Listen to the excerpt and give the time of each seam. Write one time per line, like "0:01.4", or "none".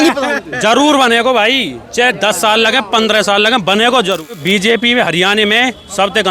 0:04.6